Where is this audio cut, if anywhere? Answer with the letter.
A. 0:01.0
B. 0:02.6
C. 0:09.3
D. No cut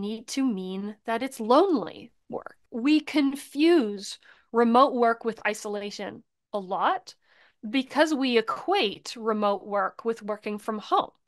B